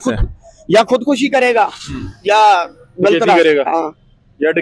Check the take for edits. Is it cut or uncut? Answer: uncut